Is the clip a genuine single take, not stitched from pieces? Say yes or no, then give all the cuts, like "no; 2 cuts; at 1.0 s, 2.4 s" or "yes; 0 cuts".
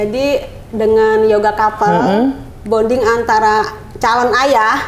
yes; 0 cuts